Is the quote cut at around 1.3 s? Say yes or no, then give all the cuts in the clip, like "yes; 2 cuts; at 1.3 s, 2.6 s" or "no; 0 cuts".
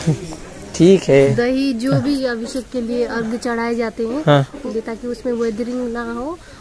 yes; 2 cuts; at 1.3 s, 4.6 s